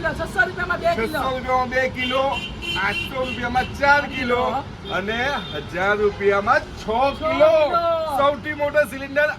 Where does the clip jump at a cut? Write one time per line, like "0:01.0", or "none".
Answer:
none

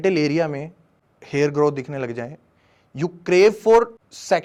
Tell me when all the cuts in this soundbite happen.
none

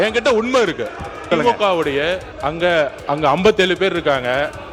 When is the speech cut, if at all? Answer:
0:01.2
0:02.3
0:03.0

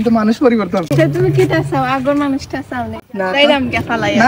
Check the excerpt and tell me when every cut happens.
0:00.9
0:03.0

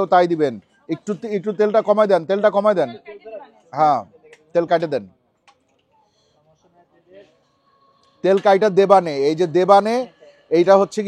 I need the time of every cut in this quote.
none

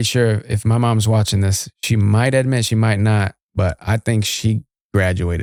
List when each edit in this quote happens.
none

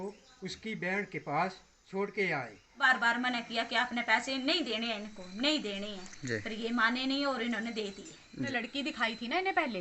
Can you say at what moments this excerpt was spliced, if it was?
0:02.7
0:08.5

